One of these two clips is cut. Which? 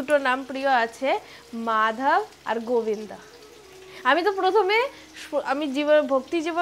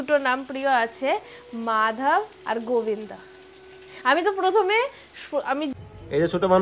second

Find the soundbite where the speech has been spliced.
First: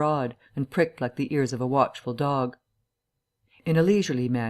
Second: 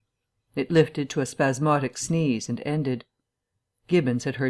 second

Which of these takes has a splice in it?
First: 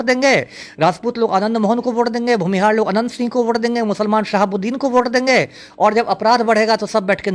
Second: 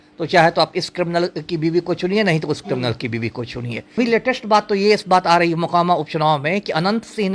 second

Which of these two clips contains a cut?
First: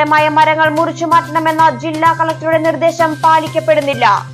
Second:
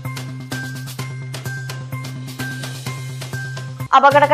second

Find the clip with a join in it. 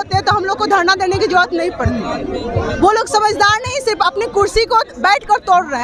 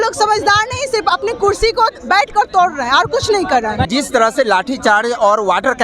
second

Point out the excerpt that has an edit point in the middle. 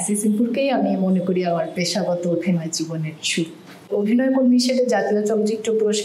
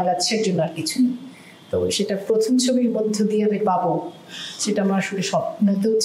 first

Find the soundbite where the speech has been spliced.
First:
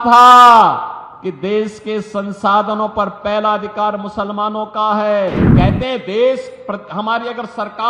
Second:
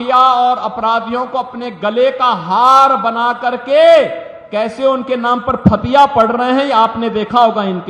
first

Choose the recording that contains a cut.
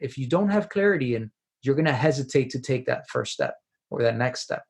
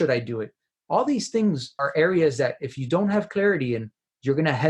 second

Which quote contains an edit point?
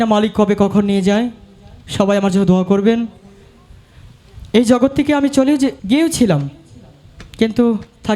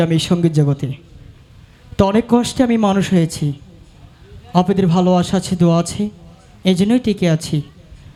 first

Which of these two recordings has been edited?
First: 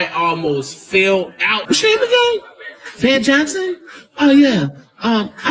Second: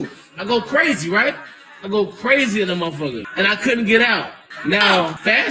first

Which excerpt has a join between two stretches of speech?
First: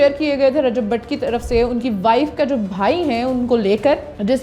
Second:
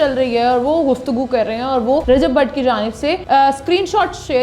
second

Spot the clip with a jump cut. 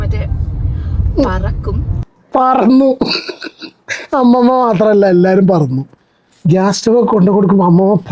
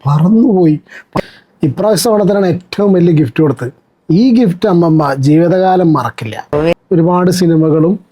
second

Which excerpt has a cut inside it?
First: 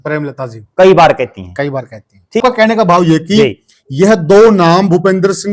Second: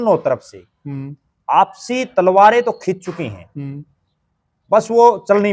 first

